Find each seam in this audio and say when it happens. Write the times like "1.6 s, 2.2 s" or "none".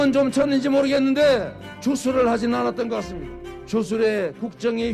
none